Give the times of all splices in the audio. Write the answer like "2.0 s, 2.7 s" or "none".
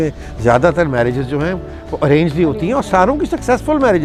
none